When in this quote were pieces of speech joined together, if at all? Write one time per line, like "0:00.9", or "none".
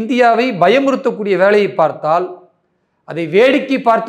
none

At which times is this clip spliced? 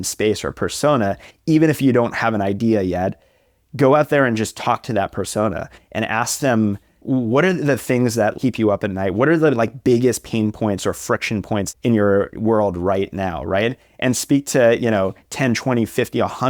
none

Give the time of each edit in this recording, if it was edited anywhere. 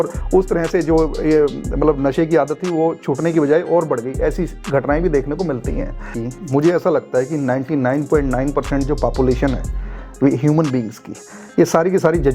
0:06.1

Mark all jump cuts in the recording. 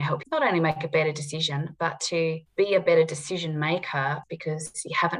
0:04.2

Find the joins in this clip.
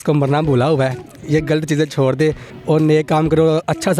0:02.5

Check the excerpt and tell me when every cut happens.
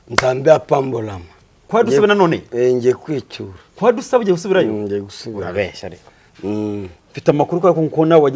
0:01.6

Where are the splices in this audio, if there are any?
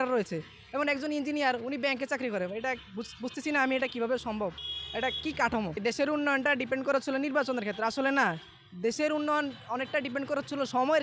0:05.8

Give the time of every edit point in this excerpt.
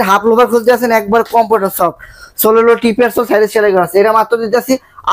none

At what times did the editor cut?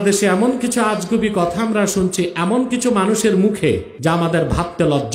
0:03.9

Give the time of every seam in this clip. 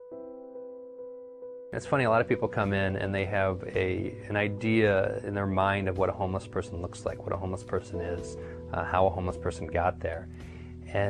0:01.7

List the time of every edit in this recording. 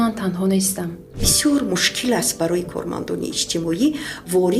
0:01.3

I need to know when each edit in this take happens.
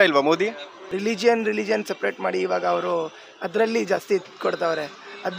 0:00.9

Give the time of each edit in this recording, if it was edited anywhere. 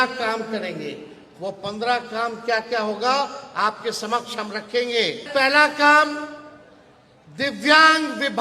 0:05.2

